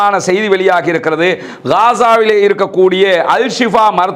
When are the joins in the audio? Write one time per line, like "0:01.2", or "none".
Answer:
none